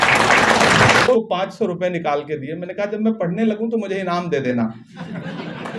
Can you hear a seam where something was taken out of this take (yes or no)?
yes